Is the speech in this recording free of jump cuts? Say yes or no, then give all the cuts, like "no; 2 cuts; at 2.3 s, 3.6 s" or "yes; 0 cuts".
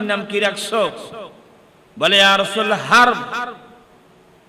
yes; 0 cuts